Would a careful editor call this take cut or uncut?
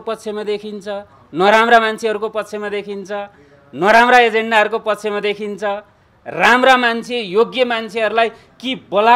uncut